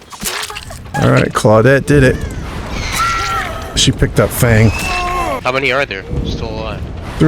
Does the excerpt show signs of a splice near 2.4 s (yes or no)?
no